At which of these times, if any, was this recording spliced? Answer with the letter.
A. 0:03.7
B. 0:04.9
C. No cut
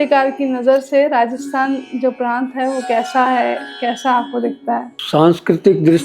B